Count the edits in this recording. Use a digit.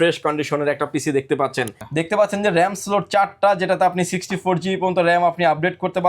1